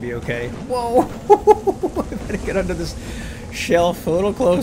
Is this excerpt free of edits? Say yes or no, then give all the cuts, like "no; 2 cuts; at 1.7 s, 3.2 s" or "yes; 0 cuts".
yes; 0 cuts